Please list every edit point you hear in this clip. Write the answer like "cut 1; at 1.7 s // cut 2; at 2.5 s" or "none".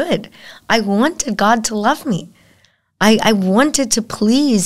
none